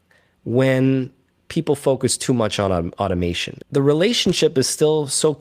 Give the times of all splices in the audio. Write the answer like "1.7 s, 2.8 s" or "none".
3.5 s

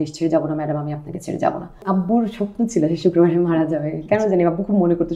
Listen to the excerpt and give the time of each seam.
1.8 s

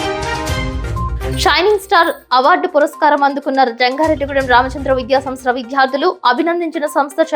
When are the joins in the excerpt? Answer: 1.2 s

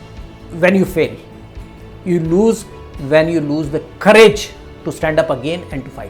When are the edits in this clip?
none

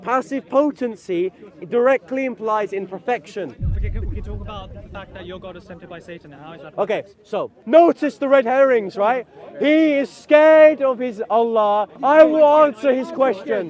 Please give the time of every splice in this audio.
7.6 s, 11.9 s

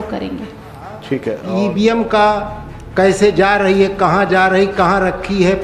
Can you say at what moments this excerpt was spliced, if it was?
1.5 s

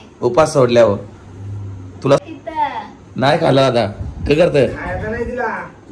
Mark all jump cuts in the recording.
2.2 s

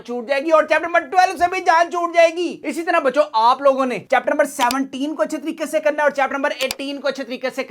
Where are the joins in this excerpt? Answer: none

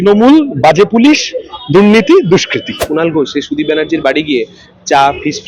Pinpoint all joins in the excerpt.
2.8 s

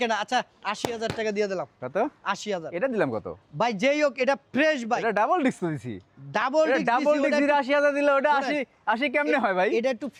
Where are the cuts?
none

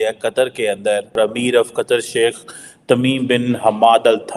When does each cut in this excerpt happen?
1.2 s

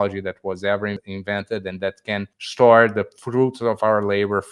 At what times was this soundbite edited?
1.0 s, 2.4 s

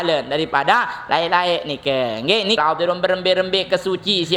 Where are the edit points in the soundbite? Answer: 2.6 s

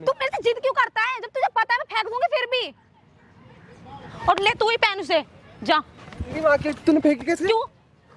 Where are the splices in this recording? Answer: none

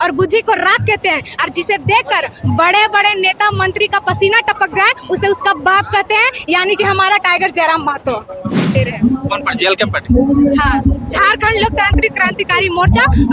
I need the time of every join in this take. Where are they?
8.8 s

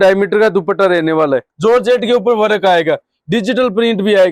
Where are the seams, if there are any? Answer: 1.5 s

